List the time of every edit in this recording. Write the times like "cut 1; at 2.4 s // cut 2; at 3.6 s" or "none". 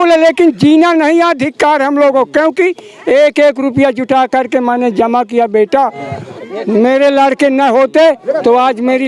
none